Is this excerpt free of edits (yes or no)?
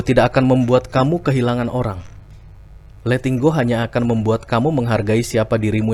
yes